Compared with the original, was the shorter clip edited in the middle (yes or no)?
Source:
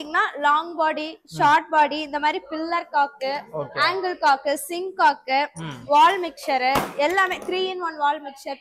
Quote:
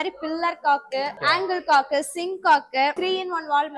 yes